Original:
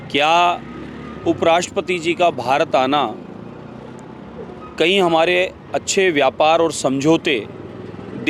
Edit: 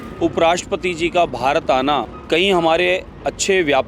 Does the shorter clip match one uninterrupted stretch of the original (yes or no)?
no